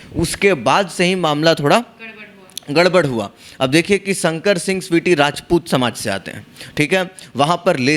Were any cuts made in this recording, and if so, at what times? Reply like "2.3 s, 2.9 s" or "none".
none